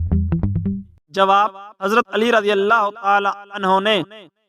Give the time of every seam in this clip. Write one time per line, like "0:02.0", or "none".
0:00.9